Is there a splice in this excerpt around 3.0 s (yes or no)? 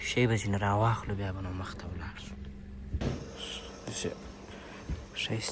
yes